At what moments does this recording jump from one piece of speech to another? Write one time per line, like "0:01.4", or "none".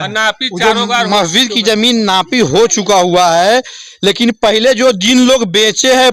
none